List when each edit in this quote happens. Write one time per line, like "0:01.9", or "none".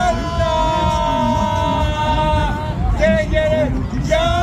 none